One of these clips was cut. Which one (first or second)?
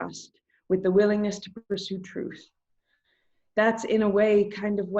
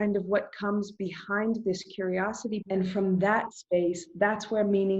second